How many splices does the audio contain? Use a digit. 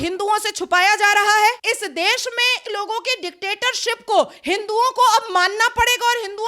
0